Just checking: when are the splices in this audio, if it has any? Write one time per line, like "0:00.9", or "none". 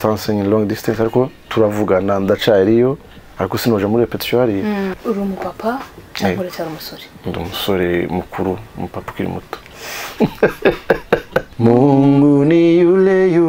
0:04.9
0:11.4